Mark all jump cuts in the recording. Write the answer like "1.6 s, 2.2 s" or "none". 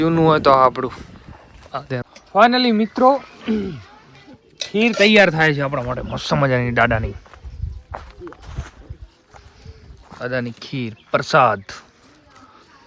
2.0 s